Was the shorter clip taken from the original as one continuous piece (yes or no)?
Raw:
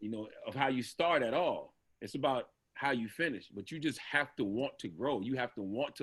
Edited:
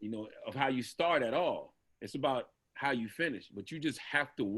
yes